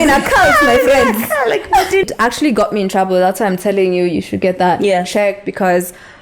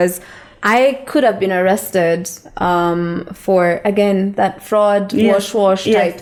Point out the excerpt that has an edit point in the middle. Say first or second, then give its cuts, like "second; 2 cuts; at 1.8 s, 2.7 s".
first; 1 cut; at 2.0 s